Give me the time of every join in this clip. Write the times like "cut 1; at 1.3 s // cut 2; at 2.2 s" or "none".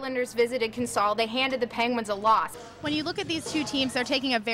cut 1; at 2.5 s